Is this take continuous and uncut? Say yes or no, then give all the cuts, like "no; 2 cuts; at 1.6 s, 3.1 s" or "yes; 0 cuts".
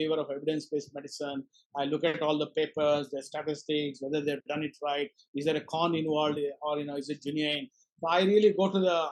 yes; 0 cuts